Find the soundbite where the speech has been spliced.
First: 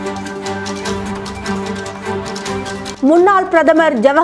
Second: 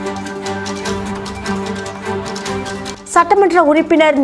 second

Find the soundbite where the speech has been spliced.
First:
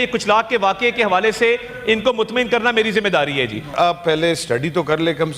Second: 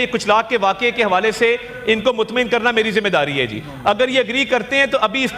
first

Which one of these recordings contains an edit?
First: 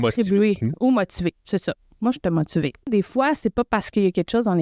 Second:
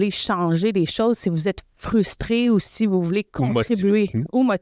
first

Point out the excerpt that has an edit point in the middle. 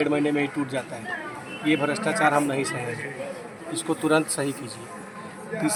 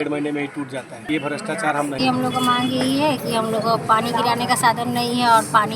second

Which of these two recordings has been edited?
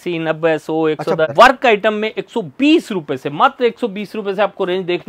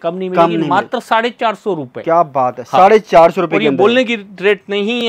first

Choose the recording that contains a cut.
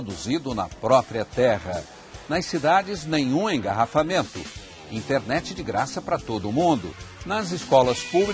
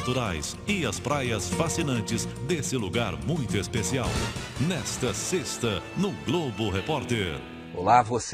first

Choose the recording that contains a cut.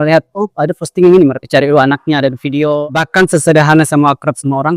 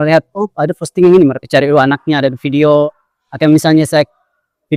first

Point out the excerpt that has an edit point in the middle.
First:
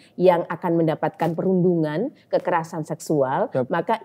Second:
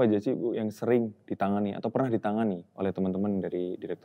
second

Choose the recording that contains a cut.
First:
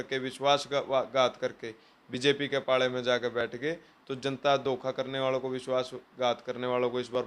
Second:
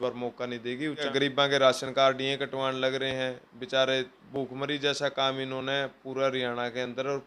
second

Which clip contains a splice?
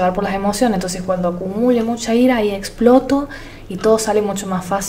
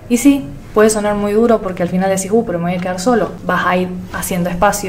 second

